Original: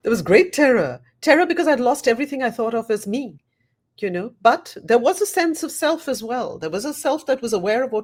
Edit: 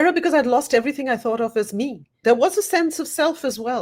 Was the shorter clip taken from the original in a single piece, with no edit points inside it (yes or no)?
no